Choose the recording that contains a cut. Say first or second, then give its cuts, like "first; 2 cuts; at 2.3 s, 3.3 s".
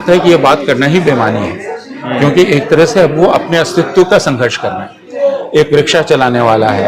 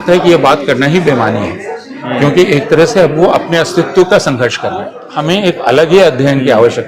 second; 1 cut; at 5.0 s